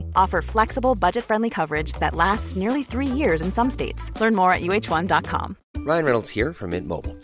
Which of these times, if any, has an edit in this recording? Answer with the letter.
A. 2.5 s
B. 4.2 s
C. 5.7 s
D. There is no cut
C